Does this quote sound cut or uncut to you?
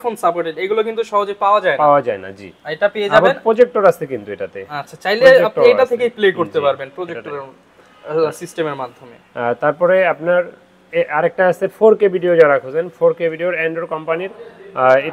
uncut